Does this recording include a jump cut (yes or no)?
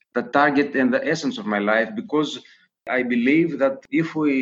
yes